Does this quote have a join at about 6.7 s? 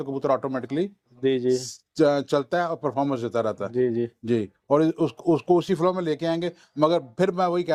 no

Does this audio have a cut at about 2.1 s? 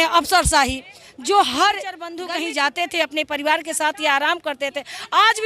yes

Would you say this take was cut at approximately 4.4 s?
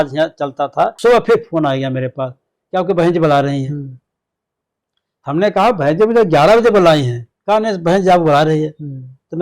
no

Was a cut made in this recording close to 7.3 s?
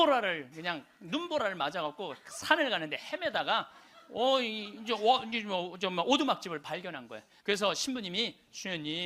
yes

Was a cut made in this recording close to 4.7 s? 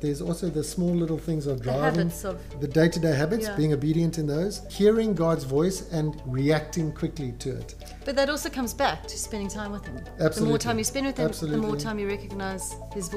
yes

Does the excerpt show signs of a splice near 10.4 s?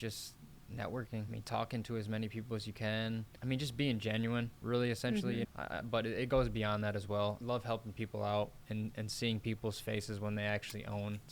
no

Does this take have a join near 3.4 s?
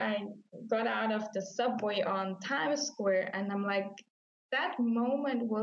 no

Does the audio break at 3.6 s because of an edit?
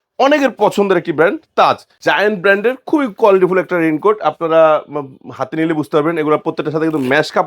no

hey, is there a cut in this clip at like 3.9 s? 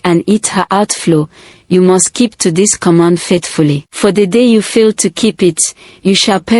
yes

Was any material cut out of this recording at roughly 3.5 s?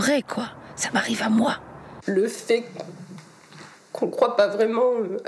no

